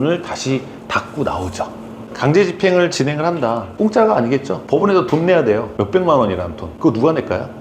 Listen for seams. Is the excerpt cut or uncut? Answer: cut